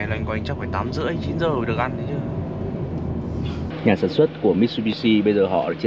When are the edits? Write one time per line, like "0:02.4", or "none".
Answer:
0:03.7